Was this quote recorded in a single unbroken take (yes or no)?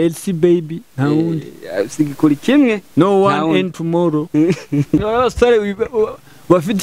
no